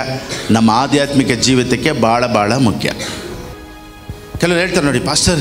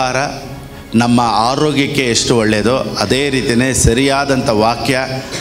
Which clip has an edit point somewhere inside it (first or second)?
first